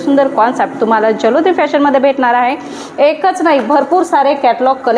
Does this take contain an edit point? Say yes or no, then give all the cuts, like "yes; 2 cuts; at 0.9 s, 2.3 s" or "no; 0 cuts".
no; 0 cuts